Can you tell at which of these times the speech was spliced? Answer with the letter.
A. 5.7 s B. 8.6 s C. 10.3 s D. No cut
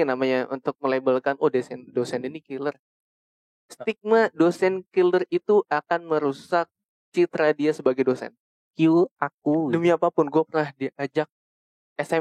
B